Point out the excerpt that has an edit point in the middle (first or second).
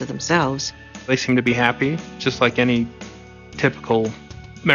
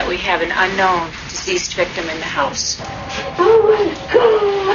first